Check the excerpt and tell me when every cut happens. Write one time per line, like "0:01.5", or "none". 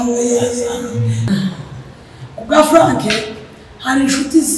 0:01.3